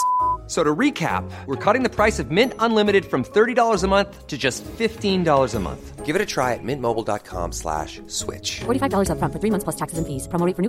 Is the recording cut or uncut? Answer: uncut